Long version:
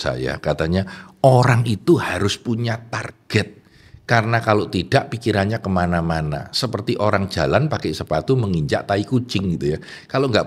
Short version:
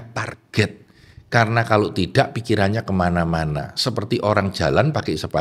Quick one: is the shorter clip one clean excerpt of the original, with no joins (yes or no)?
yes